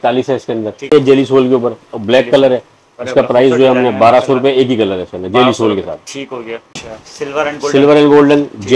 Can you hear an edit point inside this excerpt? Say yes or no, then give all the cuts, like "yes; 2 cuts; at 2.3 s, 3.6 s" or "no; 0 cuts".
yes; 2 cuts; at 0.9 s, 6.8 s